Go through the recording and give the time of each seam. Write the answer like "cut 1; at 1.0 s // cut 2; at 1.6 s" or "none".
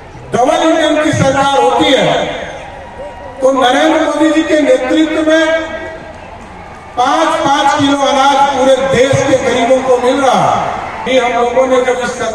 cut 1; at 10.9 s